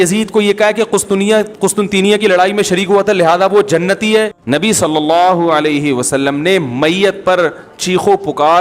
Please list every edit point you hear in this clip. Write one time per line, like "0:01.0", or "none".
0:04.4